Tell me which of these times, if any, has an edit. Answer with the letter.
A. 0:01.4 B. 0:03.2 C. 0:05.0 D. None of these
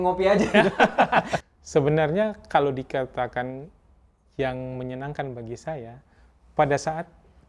A